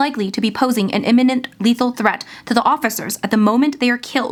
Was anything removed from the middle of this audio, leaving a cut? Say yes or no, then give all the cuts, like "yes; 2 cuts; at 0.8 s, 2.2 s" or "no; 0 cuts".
no; 0 cuts